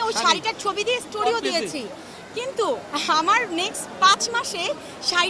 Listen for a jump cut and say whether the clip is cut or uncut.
uncut